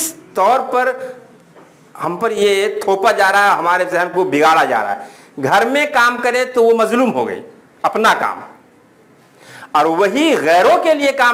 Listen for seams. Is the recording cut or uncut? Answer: uncut